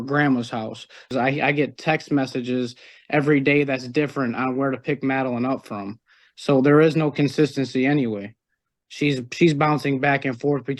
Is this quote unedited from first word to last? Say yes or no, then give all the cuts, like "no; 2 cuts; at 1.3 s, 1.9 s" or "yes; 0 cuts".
no; 1 cut; at 1.1 s